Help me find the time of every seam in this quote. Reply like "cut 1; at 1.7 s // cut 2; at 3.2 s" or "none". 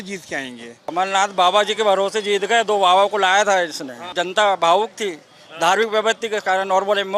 cut 1; at 0.9 s // cut 2; at 4.1 s